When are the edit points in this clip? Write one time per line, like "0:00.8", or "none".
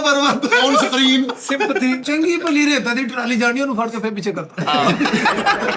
0:02.0